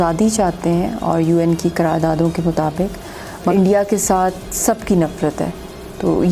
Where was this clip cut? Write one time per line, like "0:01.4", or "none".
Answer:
0:03.5